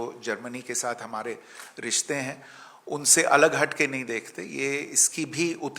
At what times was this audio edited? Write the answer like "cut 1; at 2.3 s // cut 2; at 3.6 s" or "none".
none